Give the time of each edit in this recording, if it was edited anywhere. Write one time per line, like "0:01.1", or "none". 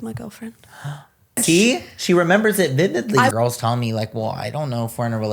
0:01.4
0:03.3